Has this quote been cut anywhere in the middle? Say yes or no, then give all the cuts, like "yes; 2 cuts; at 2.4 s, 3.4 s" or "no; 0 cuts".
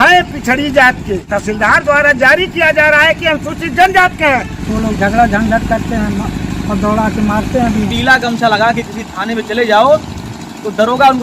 yes; 3 cuts; at 1.3 s, 4.6 s, 7.9 s